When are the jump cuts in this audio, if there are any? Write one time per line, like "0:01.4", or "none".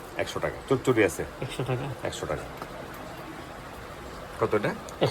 none

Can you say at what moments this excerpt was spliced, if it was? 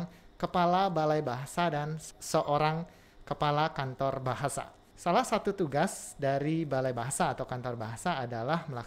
0:02.0
0:04.8

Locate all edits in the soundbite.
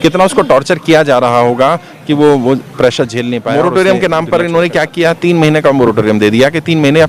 0:03.4

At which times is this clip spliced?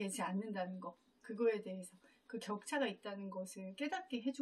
none

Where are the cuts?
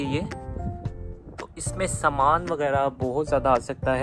none

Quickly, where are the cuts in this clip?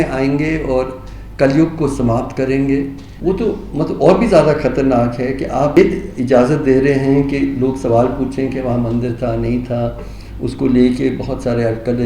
0:03.0
0:05.8

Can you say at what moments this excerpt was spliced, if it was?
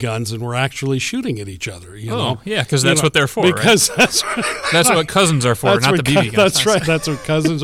none

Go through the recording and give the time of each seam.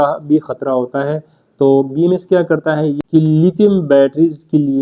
0:03.0

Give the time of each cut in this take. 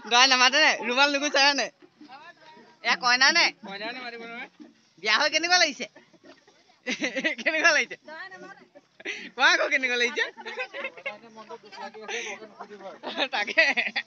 none

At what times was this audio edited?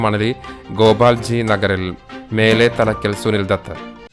none

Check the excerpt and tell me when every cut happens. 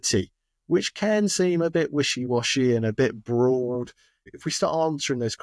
0:04.2

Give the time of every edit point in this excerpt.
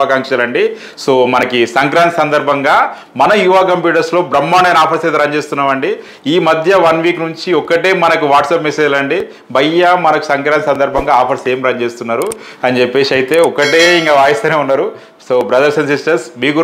none

